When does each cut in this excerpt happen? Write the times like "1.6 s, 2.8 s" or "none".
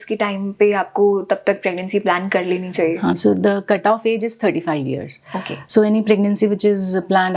none